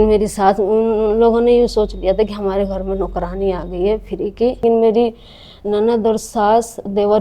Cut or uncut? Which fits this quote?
cut